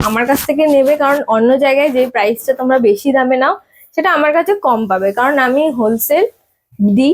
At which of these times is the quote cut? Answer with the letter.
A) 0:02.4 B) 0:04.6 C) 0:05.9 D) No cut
D